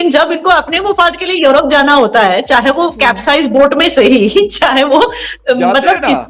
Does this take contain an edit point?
no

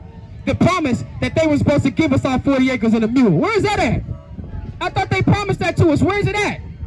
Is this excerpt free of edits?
yes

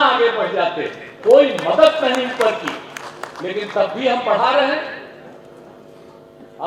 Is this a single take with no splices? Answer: yes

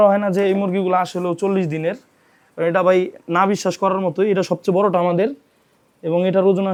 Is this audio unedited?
yes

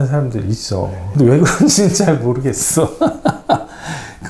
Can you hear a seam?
yes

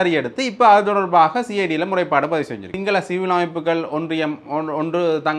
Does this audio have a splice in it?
yes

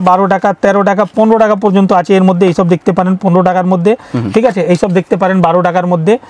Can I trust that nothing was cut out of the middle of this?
yes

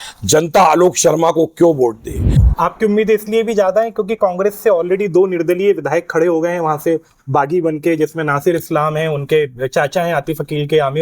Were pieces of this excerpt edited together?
yes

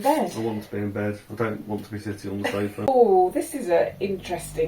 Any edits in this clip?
yes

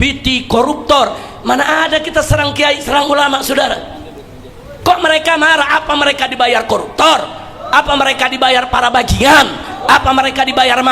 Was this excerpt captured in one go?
yes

